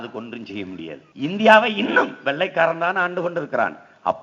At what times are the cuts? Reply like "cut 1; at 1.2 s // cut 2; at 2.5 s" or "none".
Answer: cut 1; at 1.0 s

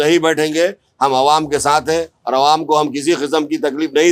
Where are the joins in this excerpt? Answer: none

